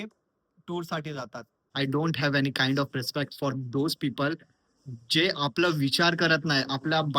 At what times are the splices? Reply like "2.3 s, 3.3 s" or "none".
1.7 s

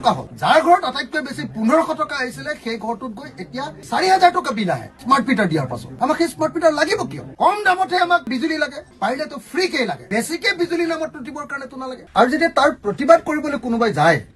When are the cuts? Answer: 8.8 s, 12.0 s

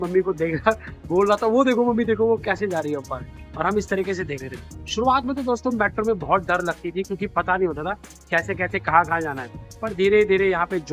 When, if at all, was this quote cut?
none

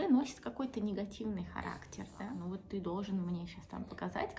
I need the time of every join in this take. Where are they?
2.2 s

